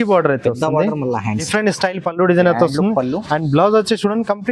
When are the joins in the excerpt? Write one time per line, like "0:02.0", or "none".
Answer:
0:01.5